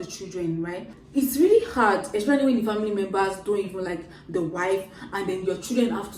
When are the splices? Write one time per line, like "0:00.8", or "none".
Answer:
0:00.9